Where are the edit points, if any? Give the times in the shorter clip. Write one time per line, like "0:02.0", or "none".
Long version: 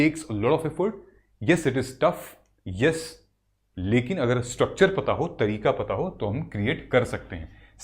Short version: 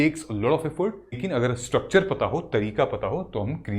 0:01.2